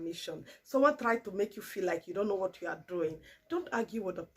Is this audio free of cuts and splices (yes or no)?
yes